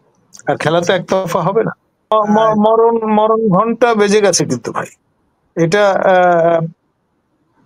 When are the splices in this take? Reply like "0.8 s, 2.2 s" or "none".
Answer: 2.1 s

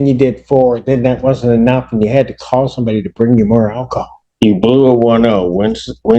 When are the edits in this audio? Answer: 4.2 s

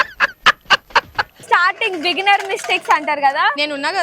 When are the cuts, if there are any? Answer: 1.3 s

